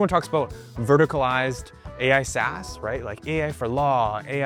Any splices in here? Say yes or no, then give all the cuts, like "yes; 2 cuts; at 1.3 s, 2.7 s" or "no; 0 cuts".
no; 0 cuts